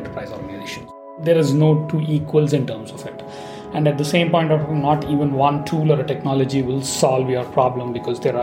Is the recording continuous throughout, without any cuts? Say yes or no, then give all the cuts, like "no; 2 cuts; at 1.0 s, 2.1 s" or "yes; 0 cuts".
no; 1 cut; at 1.1 s